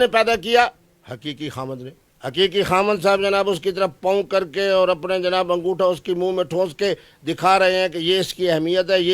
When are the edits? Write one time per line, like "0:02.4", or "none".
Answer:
none